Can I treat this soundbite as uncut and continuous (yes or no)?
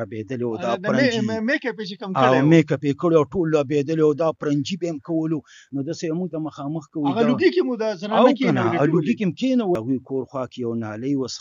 no